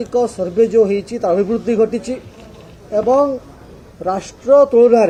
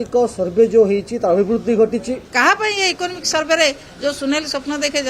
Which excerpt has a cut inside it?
second; 1 cut; at 2.2 s

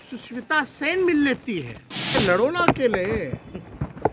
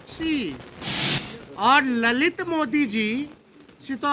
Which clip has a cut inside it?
first; 1 cut; at 2.1 s

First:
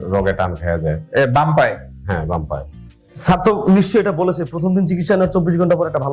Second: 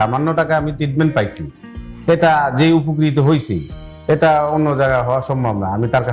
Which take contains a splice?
first; 1 cut; at 2.7 s

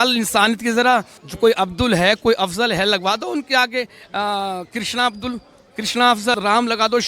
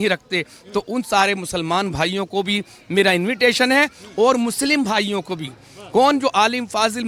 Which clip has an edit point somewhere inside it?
first; 2 cuts; at 1.2 s, 6.4 s

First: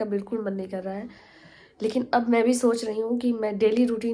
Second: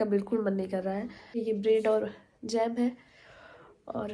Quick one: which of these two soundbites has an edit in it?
second; 1 cut; at 1.3 s

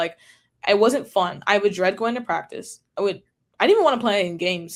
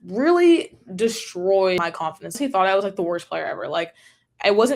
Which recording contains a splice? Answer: second; 1 cut; at 2.4 s

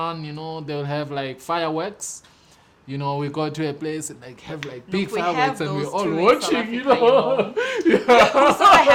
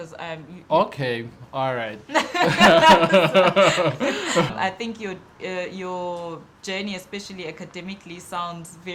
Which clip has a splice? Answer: second; 1 cut; at 4.5 s

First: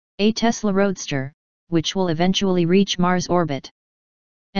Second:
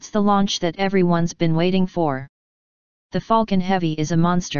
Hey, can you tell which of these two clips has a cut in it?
first; 1 cut; at 3.3 s

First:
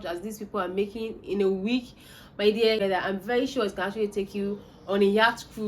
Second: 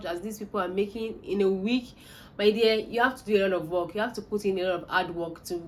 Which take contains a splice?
first; 1 cut; at 2.8 s

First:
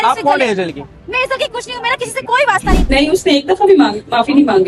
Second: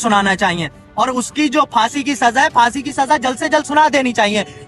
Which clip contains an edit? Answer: first; 1 cut; at 2.6 s

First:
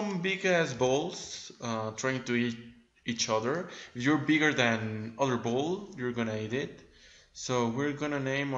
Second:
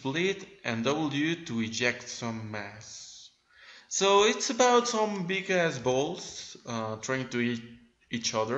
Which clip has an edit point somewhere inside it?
first; 1 cut; at 5.0 s

